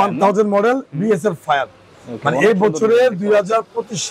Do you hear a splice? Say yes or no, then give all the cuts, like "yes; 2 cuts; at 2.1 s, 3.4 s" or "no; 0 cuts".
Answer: no; 0 cuts